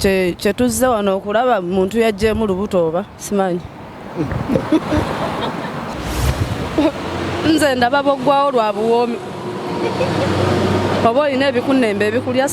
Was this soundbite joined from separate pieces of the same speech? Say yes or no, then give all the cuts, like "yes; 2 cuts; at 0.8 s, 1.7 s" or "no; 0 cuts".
yes; 1 cut; at 6.0 s